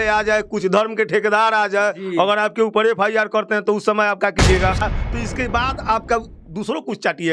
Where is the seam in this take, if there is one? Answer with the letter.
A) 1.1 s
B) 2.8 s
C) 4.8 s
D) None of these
C